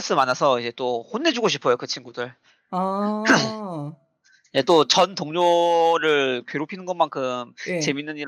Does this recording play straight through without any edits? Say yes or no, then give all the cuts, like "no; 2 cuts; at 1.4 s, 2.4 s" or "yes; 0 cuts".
yes; 0 cuts